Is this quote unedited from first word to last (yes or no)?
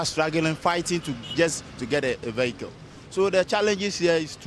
yes